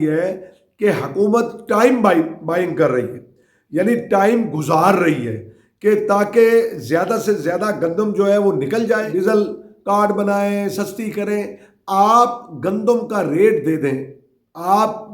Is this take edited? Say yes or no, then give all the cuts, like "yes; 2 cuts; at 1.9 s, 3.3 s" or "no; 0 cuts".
yes; 1 cut; at 9.1 s